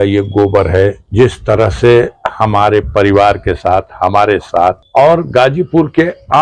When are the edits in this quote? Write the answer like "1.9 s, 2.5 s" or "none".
1.0 s, 4.8 s